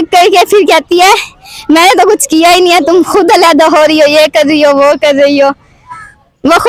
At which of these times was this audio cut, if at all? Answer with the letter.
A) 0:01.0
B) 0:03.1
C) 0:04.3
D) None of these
D